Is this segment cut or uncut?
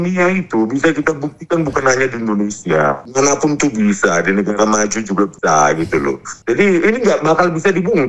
cut